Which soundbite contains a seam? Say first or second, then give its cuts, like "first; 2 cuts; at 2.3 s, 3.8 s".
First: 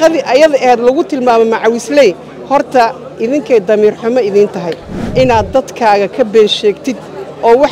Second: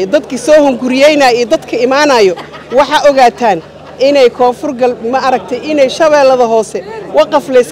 first; 1 cut; at 5.0 s